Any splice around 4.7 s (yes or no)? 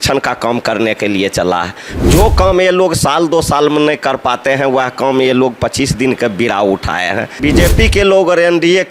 no